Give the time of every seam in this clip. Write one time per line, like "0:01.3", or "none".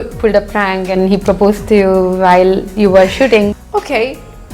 0:03.5